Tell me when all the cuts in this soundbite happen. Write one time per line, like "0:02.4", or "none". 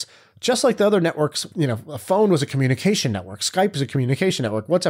0:01.4